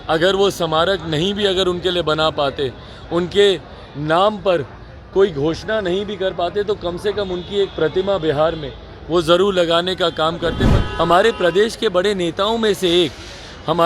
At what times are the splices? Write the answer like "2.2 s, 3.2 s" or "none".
10.7 s